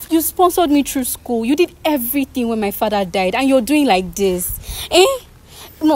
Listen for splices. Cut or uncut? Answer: uncut